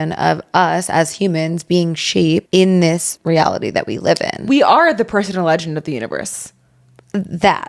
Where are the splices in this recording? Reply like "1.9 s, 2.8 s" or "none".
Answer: 2.5 s, 3.1 s, 4.4 s